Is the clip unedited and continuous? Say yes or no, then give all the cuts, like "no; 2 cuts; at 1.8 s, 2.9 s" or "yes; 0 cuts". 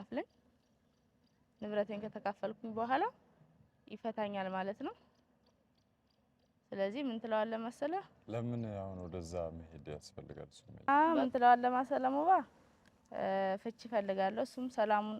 no; 1 cut; at 10.9 s